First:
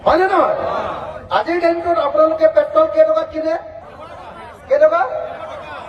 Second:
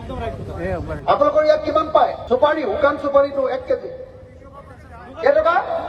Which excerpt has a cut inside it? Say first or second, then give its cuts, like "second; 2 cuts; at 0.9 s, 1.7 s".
second; 1 cut; at 2.2 s